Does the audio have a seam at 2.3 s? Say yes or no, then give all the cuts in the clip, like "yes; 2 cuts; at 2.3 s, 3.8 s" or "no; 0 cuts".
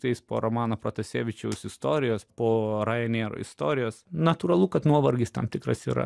yes; 2 cuts; at 2.3 s, 4.0 s